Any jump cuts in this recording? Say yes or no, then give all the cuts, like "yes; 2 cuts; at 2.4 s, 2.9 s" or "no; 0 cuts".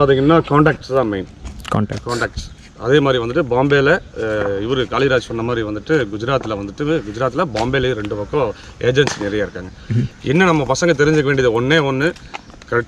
no; 0 cuts